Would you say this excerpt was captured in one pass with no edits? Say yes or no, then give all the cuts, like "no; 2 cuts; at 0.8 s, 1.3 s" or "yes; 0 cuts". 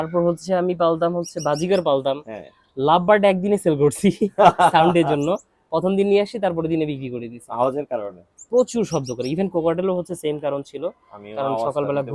yes; 0 cuts